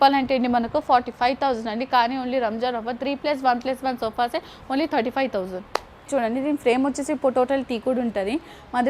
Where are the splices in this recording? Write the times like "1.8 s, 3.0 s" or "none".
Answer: 6.1 s

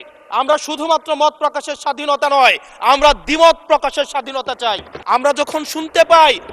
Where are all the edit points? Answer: 4.9 s

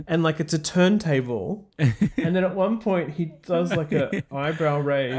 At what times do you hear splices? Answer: 2.2 s

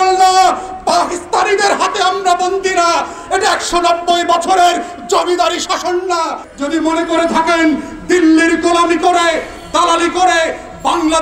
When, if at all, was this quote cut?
6.5 s

